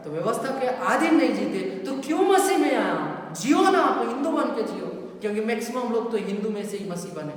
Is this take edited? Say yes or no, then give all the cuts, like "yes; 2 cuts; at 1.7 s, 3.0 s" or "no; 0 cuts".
no; 0 cuts